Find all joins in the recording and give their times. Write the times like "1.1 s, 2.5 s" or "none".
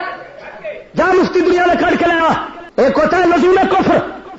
2.6 s